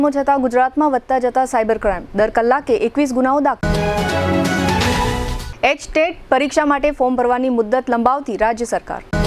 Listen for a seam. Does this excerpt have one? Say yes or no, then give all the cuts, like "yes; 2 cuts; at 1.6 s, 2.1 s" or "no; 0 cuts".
no; 0 cuts